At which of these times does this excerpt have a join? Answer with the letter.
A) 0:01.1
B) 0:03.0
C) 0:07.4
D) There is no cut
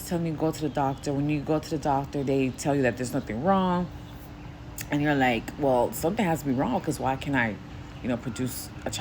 D